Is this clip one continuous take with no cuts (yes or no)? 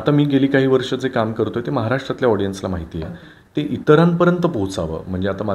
yes